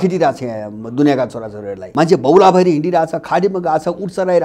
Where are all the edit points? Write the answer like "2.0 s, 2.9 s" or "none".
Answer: 1.8 s